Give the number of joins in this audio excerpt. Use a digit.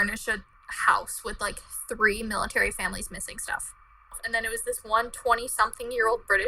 1